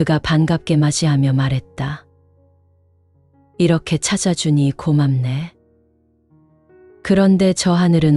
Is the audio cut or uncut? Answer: cut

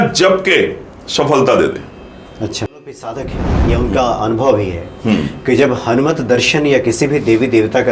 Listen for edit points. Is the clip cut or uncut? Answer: cut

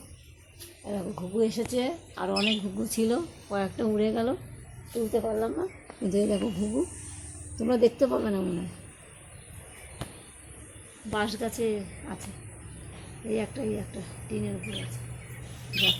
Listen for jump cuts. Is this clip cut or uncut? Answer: uncut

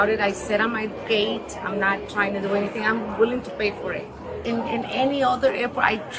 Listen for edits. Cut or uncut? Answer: cut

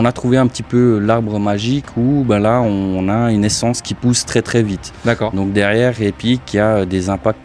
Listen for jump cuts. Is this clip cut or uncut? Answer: uncut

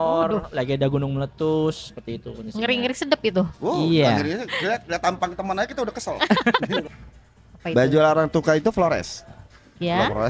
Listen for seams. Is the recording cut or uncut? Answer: cut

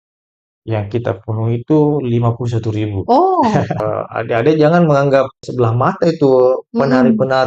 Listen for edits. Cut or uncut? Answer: cut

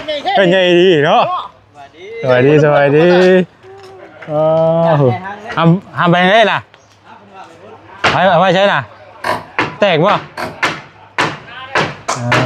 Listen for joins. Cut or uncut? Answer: uncut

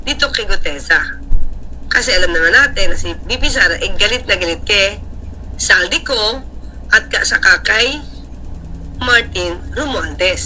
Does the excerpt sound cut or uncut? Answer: uncut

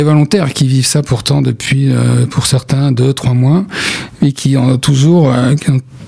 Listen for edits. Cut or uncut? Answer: uncut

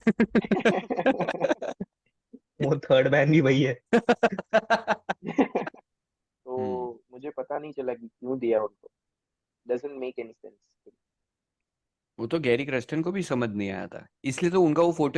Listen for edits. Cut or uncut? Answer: cut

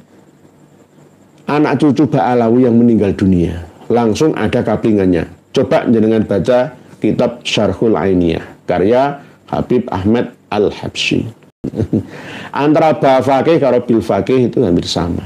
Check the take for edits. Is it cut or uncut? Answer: cut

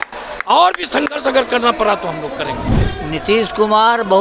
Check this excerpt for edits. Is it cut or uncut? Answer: cut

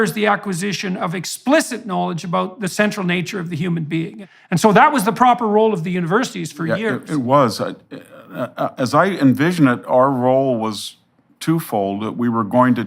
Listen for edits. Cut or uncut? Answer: cut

